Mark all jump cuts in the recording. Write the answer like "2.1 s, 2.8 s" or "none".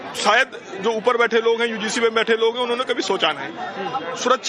2.4 s